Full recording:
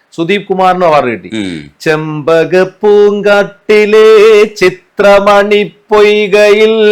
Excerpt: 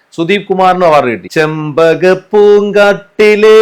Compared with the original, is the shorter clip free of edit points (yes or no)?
no